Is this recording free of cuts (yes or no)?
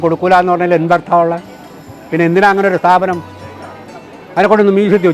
yes